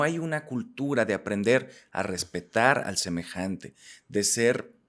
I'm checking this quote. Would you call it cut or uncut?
uncut